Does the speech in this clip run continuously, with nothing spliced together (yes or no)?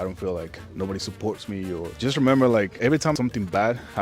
no